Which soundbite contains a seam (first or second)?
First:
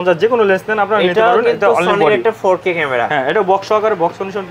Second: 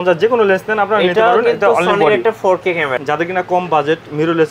second